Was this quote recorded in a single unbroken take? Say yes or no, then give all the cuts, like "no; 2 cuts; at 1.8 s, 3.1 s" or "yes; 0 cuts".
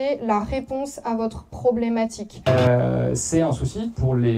no; 1 cut; at 2.5 s